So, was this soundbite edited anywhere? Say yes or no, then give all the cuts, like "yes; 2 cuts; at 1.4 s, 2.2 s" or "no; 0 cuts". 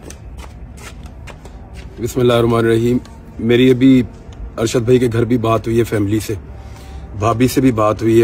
yes; 1 cut; at 1.3 s